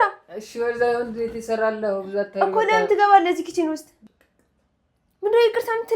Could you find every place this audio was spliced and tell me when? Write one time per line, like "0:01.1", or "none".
0:03.9